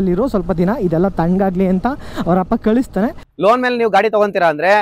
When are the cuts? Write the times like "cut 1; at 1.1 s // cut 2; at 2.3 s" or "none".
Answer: cut 1; at 3.3 s